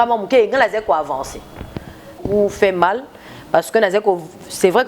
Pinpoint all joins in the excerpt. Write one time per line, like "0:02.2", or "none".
0:02.2

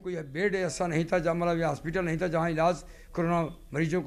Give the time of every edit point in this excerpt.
none

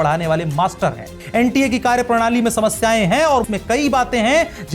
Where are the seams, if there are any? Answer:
0:01.1
0:03.4

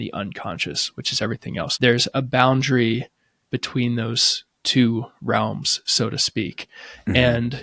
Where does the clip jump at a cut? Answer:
0:01.7

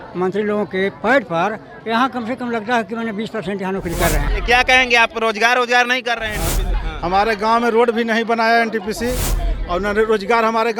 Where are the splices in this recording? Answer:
0:04.3
0:06.7

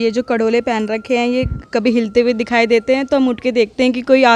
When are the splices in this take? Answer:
none

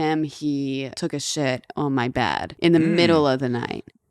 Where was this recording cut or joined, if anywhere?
0:00.9
0:02.5

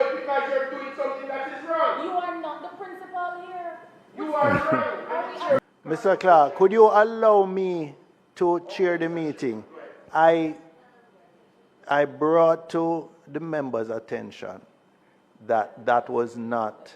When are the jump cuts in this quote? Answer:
0:05.6

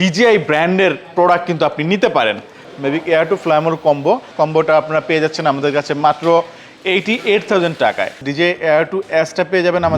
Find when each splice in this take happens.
0:02.7
0:04.3
0:08.2

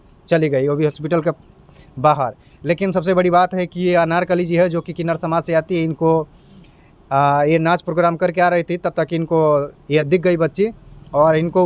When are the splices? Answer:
0:10.1

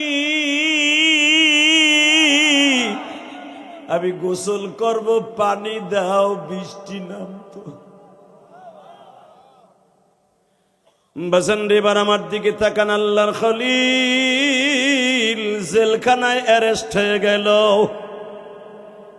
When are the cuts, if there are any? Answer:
0:10.4

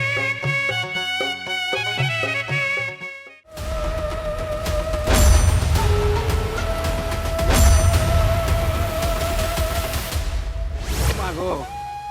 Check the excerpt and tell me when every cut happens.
0:11.0

